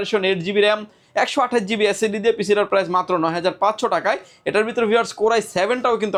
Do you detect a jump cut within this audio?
no; 0 cuts

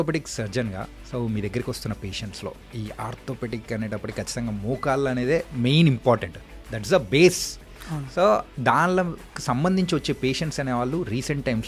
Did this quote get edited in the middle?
no; 0 cuts

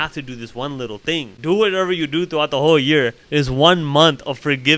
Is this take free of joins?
no; 1 cut; at 1.3 s

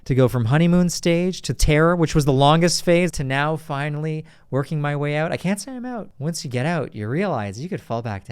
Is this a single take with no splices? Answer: no; 2 cuts; at 3.1 s, 6.1 s

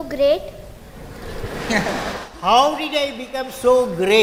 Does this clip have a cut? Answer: no; 0 cuts

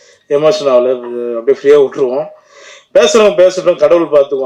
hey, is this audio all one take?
yes; 0 cuts

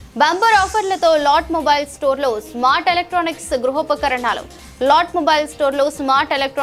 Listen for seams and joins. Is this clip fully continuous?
yes; 0 cuts

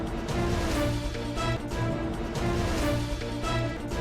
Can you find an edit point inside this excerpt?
yes; 1 cut; at 3.1 s

